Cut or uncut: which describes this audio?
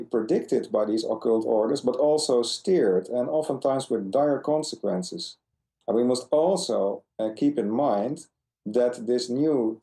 uncut